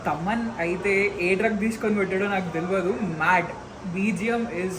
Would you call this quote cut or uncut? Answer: uncut